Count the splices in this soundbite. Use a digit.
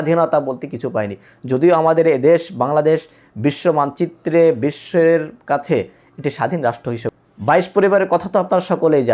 1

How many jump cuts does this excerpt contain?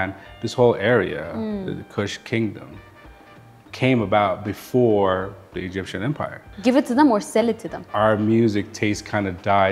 2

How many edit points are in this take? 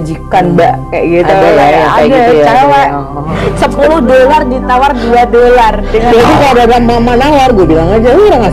1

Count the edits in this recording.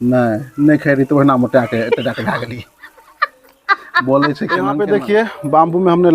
1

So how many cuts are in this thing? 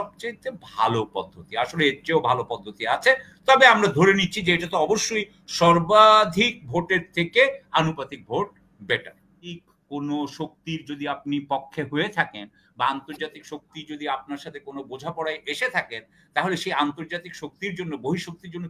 1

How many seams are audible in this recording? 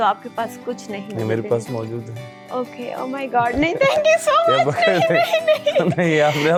0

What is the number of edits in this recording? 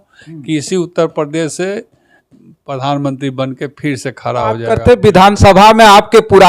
1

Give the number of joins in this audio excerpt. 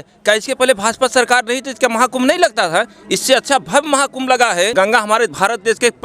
1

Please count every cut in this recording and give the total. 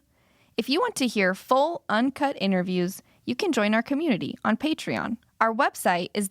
1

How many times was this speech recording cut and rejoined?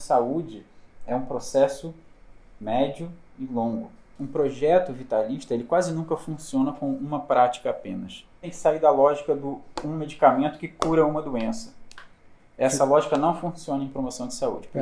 2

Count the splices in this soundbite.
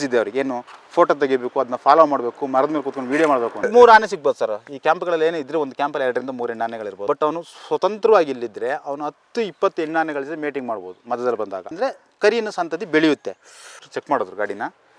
3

